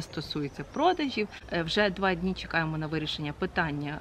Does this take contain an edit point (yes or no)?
yes